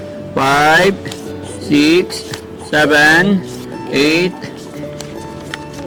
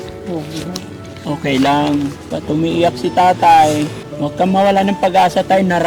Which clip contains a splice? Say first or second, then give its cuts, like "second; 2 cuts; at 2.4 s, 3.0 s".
second; 2 cuts; at 2.3 s, 4.0 s